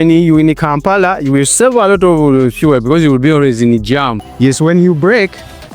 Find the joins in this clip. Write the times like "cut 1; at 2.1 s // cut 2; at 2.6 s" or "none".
cut 1; at 4.5 s